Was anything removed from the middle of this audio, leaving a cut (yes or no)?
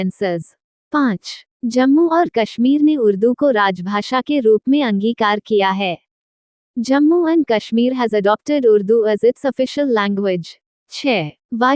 yes